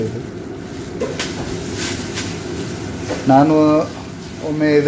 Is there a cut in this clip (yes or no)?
no